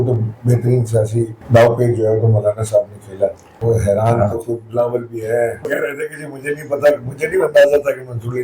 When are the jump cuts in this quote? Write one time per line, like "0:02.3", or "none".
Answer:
0:01.4
0:03.5
0:05.7